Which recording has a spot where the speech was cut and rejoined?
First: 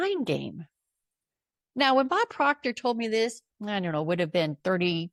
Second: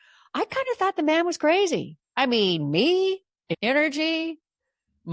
second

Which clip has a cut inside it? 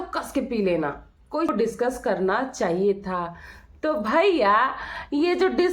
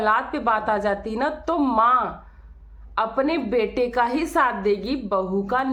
first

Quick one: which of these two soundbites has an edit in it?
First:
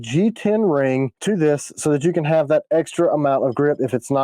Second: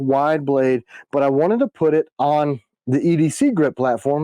first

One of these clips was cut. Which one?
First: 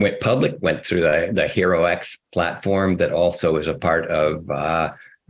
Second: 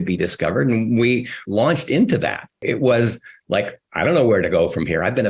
second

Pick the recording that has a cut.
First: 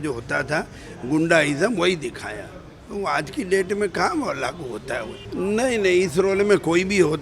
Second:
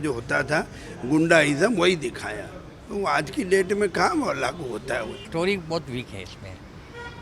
second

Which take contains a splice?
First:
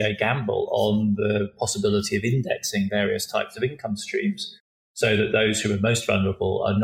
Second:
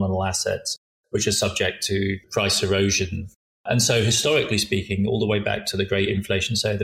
second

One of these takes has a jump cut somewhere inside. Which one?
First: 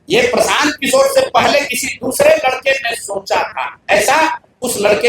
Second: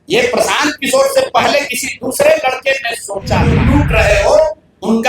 second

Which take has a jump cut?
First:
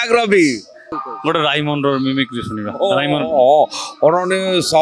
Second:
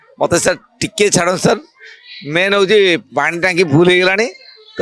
first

